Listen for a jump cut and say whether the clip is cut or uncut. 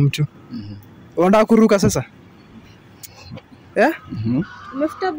uncut